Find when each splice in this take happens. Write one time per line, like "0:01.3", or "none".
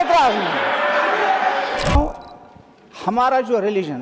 0:02.0